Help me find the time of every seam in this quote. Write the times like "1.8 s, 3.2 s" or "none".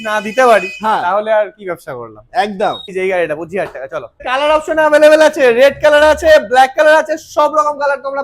2.9 s, 4.2 s